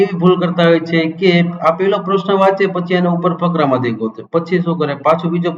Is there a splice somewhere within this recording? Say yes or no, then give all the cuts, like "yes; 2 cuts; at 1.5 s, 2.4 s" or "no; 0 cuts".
no; 0 cuts